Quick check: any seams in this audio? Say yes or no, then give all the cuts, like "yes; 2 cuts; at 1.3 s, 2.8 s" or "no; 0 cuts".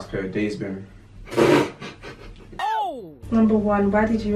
yes; 1 cut; at 2.6 s